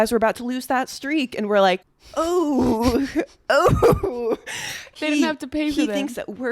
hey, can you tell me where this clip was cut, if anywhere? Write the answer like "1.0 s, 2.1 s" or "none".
2.0 s, 5.0 s